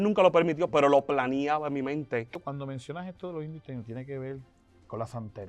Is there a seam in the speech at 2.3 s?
yes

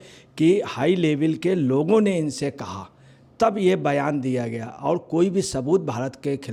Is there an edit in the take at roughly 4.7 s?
no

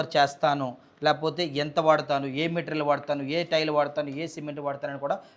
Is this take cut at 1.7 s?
no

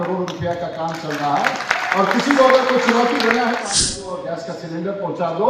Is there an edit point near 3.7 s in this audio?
yes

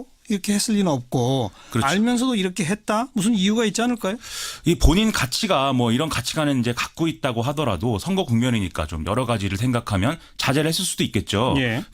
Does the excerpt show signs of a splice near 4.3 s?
yes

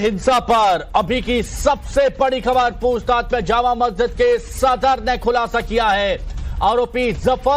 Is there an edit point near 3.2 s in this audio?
yes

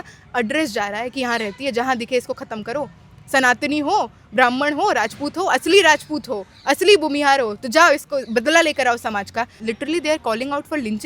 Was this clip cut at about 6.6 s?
no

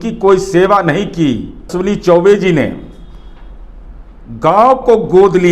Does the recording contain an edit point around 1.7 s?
yes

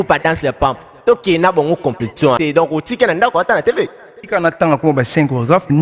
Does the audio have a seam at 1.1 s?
no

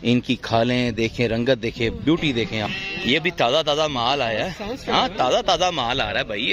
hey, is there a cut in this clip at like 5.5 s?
no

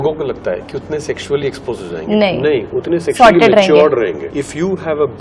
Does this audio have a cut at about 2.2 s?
no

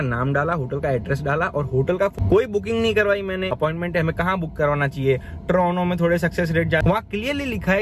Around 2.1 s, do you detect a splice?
yes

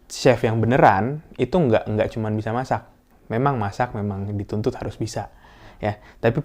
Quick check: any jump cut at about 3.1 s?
yes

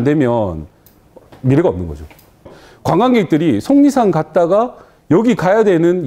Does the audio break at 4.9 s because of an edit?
no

